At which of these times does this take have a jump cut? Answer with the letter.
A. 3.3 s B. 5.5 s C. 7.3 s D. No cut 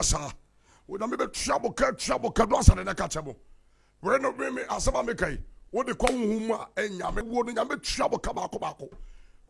C